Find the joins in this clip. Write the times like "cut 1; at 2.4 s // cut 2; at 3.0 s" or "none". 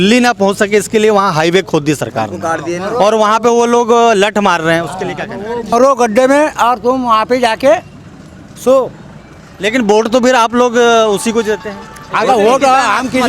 cut 1; at 5.7 s